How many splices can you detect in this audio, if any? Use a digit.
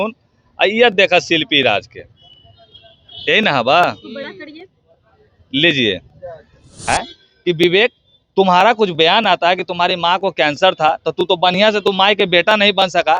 1